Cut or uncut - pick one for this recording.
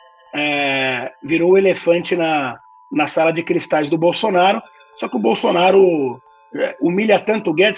uncut